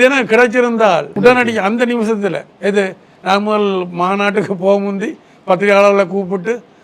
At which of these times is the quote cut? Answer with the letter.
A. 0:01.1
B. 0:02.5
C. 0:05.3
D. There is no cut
A